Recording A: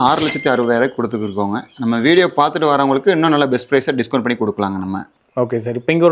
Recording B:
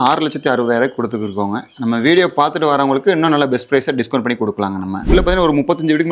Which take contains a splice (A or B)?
B